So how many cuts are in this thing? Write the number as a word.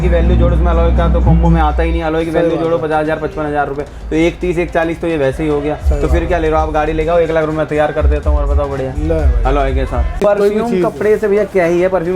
one